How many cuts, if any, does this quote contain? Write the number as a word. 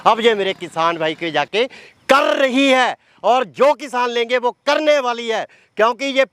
zero